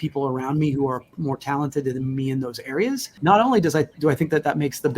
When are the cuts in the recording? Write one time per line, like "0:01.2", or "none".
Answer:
0:03.1